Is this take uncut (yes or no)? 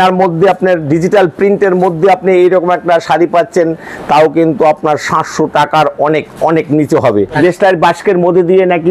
no